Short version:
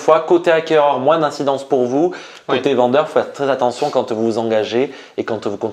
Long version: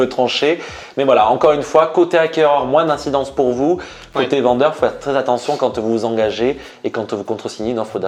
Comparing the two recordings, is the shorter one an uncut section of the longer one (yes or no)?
yes